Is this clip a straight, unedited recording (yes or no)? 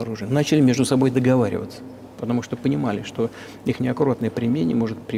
yes